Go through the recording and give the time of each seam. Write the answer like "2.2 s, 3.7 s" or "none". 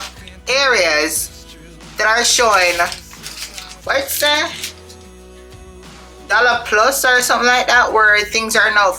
none